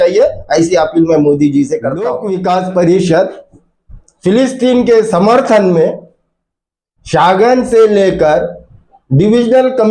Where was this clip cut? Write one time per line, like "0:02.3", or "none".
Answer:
0:02.1